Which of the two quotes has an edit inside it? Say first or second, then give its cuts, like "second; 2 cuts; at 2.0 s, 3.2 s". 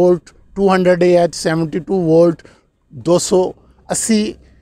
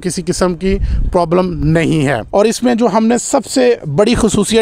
second; 1 cut; at 2.2 s